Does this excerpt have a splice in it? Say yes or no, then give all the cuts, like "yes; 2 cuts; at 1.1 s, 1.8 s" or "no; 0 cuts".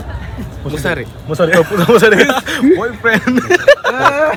no; 0 cuts